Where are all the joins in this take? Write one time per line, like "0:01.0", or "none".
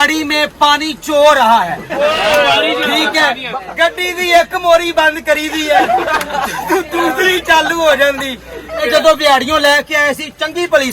0:03.5
0:08.8